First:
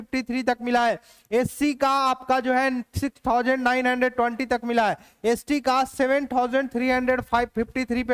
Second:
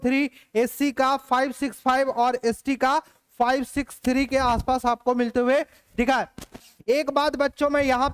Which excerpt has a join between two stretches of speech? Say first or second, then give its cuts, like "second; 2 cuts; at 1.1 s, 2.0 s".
second; 1 cut; at 6.7 s